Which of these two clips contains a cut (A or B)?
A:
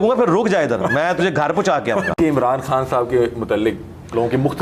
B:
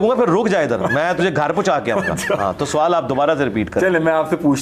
A